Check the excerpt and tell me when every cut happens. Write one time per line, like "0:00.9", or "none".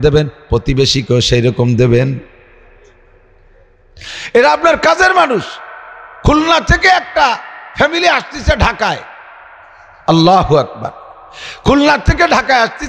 none